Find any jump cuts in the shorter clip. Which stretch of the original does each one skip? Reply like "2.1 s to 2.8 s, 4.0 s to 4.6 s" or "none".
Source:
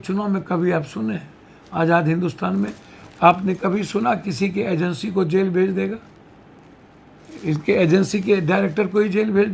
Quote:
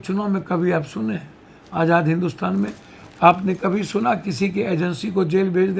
none